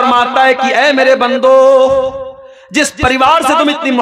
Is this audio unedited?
yes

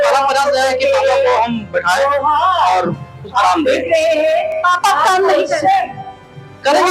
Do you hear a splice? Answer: no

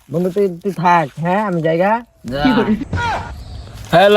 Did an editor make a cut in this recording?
yes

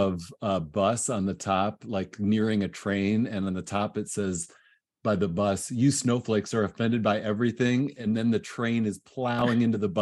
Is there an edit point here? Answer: no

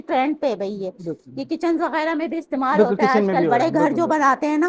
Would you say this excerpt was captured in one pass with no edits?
yes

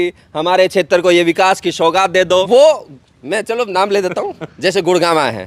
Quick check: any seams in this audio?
yes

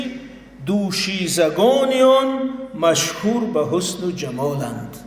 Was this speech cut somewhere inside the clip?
no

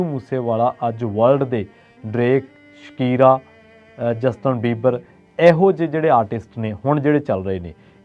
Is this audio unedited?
yes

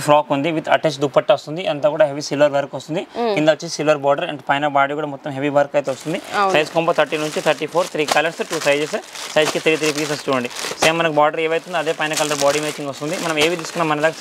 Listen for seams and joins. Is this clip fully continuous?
yes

